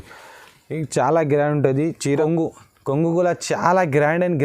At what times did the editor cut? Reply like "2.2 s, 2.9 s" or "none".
2.2 s